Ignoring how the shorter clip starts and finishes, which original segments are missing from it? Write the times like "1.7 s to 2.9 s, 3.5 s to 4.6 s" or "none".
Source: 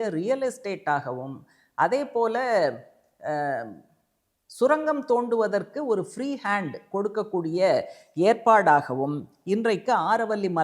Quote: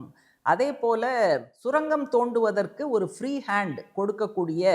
2.9 s to 4.5 s